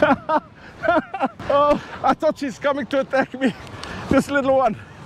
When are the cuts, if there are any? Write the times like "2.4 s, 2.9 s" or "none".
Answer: 1.4 s, 1.9 s